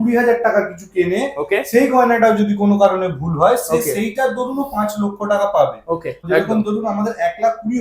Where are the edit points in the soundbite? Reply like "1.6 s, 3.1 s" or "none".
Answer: 6.2 s